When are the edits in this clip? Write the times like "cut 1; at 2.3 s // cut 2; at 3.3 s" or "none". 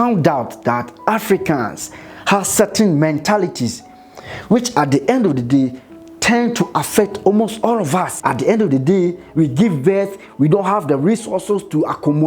cut 1; at 8.1 s